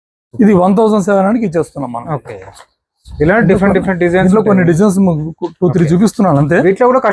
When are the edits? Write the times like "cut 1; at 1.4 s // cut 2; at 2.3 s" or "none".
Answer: none